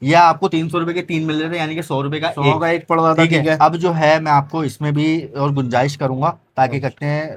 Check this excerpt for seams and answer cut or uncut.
uncut